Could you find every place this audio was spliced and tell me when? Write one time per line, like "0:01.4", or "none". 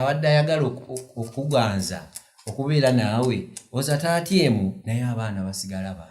0:04.8